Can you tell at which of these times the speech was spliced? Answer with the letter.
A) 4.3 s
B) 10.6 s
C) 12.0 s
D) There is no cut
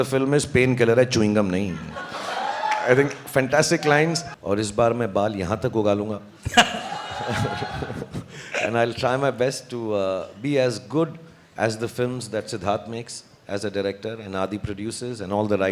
A